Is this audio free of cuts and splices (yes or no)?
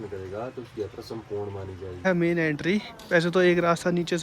no